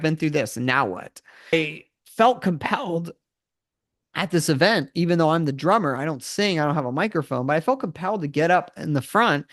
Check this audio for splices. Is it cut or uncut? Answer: cut